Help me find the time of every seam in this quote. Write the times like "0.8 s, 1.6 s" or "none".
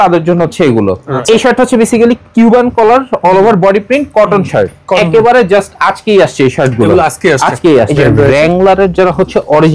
1.1 s, 4.9 s, 7.9 s